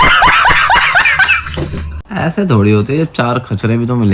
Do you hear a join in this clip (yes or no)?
yes